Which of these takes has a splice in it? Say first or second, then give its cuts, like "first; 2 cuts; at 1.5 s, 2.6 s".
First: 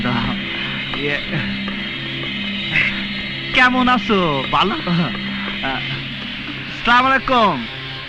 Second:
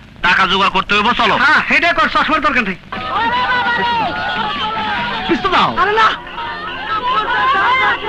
second; 1 cut; at 3.0 s